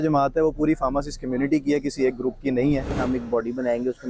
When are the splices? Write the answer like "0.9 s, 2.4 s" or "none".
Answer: 2.9 s